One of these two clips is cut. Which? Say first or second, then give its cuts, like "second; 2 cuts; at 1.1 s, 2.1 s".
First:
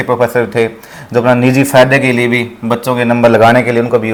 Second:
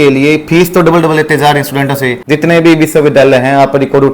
second; 1 cut; at 2.2 s